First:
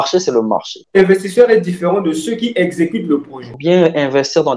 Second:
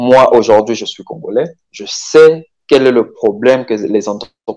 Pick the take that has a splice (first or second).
first